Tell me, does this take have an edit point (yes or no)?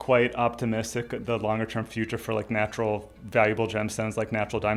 no